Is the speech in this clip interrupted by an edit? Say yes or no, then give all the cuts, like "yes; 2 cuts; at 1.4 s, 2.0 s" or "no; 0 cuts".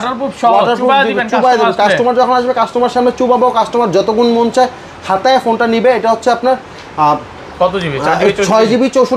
no; 0 cuts